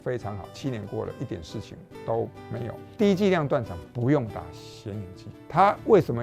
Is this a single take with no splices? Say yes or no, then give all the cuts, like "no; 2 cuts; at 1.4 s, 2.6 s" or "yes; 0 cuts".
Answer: no; 1 cut; at 2.9 s